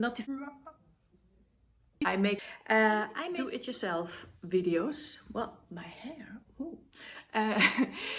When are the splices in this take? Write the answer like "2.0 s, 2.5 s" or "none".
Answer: 2.4 s